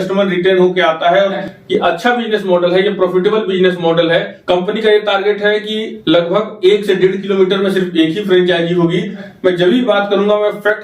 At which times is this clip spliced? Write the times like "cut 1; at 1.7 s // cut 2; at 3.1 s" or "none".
cut 1; at 1.4 s // cut 2; at 4.4 s // cut 3; at 9.2 s